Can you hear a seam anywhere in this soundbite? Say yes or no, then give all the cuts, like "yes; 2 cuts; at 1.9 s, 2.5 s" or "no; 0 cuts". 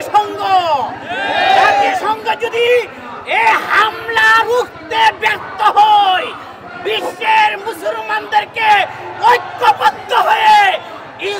no; 0 cuts